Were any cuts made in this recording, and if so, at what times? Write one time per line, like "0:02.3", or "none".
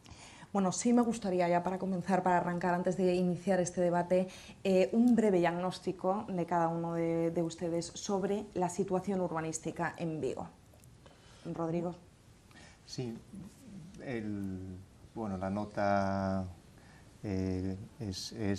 0:10.6

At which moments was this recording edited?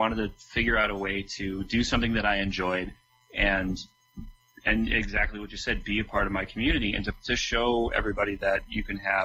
none

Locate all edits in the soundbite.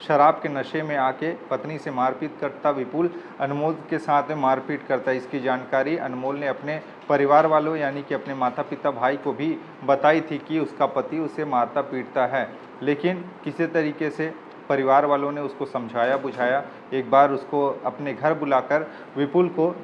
none

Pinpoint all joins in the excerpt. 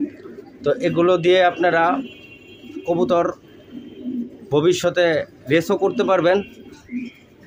none

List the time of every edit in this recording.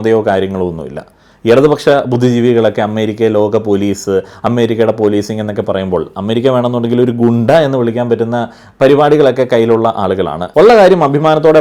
0:10.4

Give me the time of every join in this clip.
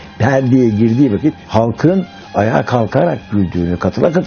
0:01.4

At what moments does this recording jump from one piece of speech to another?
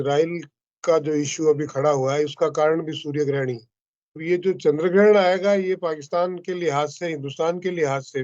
0:04.1

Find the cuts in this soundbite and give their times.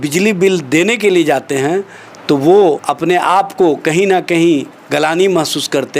0:02.9

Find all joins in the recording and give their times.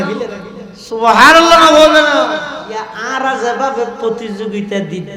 0:02.9

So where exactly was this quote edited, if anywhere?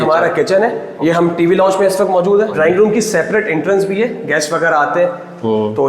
0:00.9
0:02.5

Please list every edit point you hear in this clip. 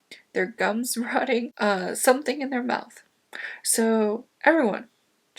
none

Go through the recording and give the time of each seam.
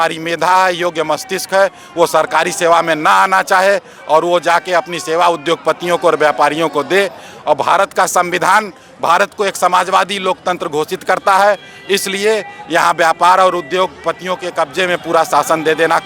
none

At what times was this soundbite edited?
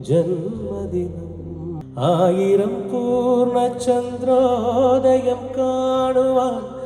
0:01.8

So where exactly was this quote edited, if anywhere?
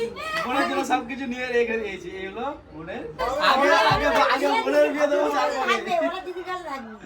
0:03.2

